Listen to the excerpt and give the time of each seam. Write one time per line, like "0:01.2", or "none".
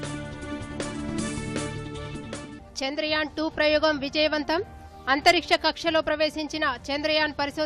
none